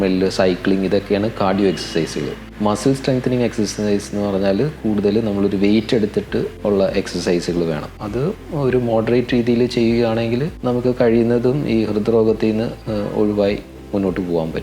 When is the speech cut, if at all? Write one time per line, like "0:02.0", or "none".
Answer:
0:06.5
0:08.0
0:10.5